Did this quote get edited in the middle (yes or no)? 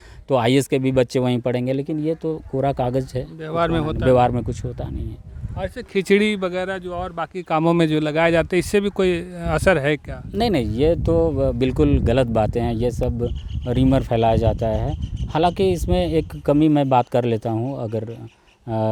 no